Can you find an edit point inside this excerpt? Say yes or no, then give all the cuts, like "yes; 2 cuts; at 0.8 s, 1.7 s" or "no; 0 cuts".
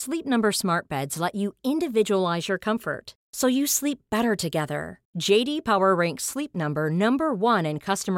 no; 0 cuts